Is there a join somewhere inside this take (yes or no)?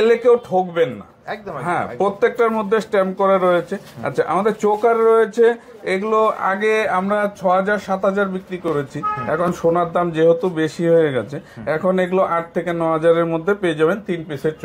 no